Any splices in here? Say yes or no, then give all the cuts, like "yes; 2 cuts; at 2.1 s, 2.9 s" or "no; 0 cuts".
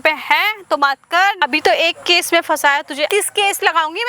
yes; 2 cuts; at 1.4 s, 3.1 s